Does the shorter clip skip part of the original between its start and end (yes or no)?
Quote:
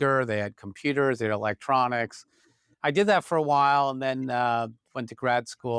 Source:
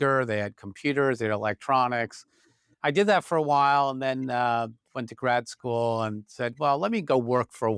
no